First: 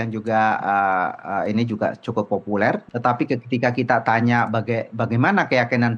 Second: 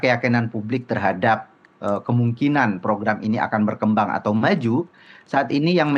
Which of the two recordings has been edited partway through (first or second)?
first